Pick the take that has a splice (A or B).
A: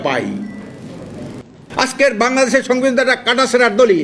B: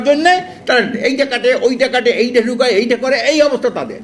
A